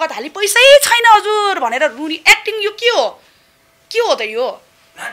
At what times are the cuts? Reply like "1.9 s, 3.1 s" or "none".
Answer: none